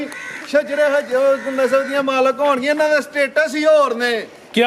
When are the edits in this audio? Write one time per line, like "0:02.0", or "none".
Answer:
none